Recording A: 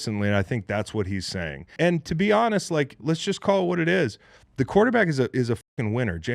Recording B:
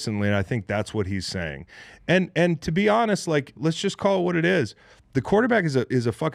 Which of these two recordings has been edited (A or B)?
A